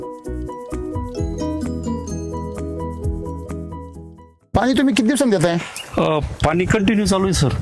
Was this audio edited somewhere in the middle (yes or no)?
yes